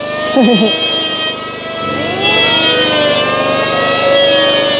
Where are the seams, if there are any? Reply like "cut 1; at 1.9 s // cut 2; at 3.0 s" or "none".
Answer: none

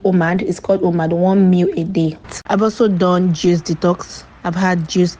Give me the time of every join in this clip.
cut 1; at 2.2 s

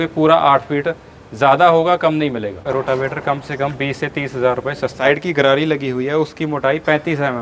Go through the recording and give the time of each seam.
cut 1; at 2.6 s // cut 2; at 5.0 s

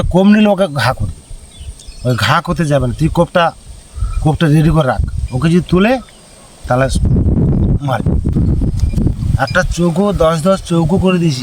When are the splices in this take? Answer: cut 1; at 8.8 s

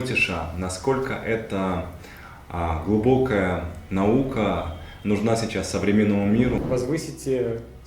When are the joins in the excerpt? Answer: cut 1; at 6.6 s

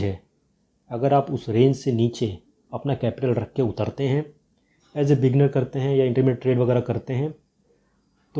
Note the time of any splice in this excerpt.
none

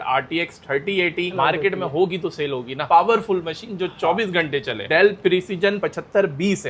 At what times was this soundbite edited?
cut 1; at 1.3 s // cut 2; at 2.8 s

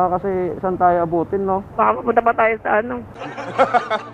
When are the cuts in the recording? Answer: cut 1; at 1.7 s

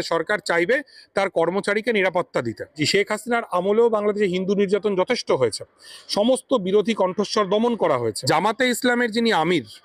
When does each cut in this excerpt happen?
cut 1; at 2.8 s // cut 2; at 8.2 s

